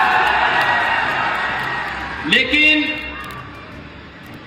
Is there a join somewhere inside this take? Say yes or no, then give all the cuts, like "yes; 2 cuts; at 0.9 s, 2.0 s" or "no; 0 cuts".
no; 0 cuts